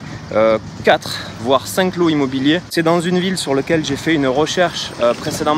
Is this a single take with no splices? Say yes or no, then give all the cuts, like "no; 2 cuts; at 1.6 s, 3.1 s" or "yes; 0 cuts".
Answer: no; 1 cut; at 2.7 s